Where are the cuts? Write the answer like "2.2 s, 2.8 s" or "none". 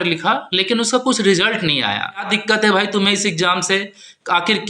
2.2 s